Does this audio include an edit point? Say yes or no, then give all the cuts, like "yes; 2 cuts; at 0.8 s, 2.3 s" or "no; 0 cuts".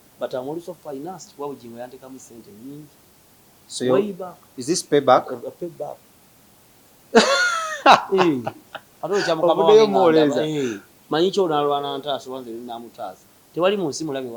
no; 0 cuts